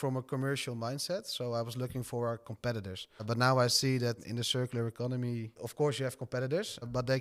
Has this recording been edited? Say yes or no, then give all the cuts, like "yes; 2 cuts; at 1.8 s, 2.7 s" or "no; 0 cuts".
no; 0 cuts